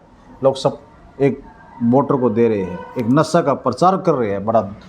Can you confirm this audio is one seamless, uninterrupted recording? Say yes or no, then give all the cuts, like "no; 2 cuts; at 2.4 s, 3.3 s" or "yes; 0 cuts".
yes; 0 cuts